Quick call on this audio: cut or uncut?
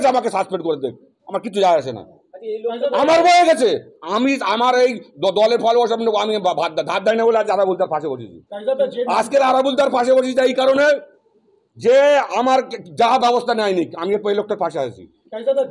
uncut